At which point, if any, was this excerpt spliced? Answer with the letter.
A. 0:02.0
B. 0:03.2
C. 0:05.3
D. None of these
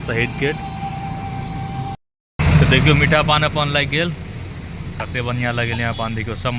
A